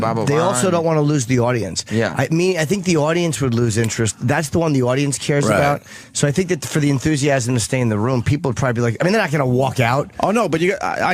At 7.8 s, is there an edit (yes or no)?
no